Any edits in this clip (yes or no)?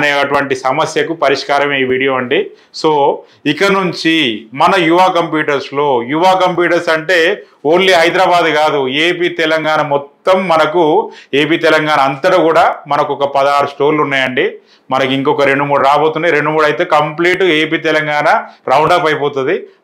no